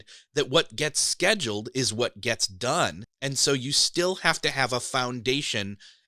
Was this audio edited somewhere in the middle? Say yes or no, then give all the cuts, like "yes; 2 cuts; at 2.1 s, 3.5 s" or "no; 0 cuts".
yes; 1 cut; at 3.1 s